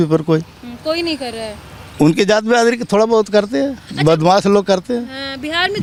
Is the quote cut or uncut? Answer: uncut